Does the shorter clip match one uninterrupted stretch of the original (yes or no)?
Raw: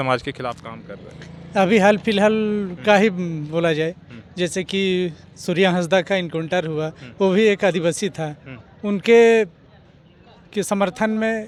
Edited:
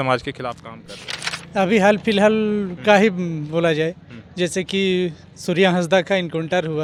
yes